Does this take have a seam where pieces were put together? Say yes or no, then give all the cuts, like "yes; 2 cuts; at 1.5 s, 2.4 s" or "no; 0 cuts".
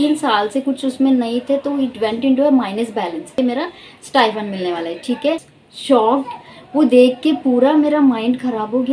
yes; 2 cuts; at 3.4 s, 5.5 s